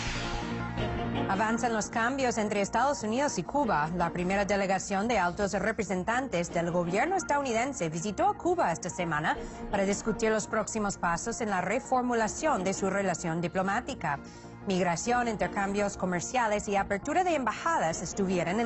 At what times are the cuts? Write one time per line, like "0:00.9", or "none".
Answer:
0:03.9